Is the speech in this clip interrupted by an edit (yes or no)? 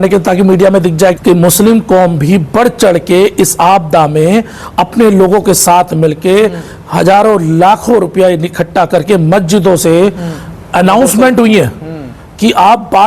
yes